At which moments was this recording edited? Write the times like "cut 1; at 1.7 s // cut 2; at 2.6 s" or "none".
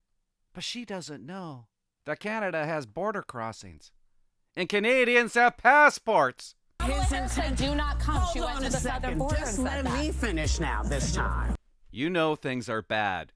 cut 1; at 6.8 s // cut 2; at 11.5 s

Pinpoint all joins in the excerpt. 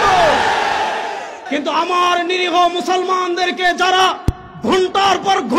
cut 1; at 1.4 s

